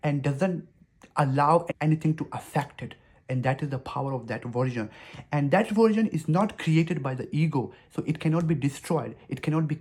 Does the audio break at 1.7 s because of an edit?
yes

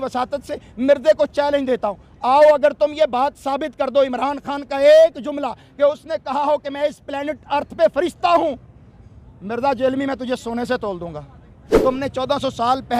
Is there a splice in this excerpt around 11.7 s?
yes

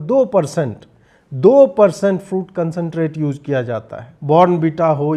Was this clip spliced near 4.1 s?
yes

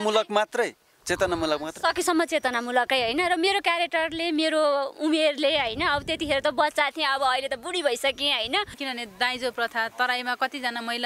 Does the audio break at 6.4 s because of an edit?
no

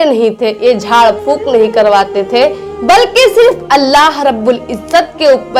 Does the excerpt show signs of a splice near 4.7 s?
no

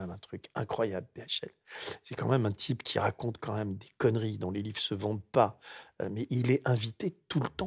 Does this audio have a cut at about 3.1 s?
no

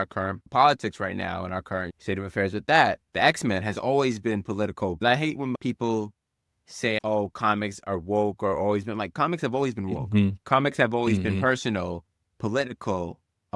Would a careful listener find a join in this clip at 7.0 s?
yes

